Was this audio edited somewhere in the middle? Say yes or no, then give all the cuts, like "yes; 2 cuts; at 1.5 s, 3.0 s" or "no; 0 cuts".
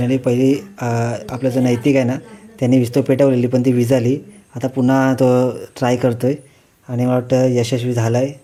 no; 0 cuts